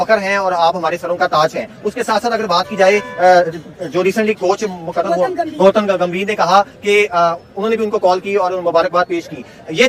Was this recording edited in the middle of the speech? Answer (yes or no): no